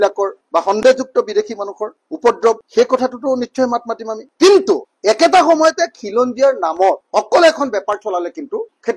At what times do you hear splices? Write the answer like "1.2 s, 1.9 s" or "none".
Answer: 4.3 s